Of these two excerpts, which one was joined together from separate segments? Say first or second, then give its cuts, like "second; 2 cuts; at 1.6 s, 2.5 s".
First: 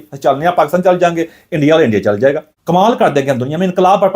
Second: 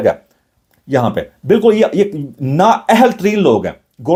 first; 1 cut; at 2.5 s